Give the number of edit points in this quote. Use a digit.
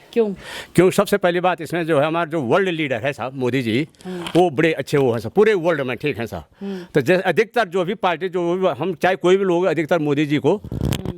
0